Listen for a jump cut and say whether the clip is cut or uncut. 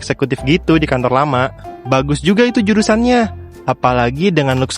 cut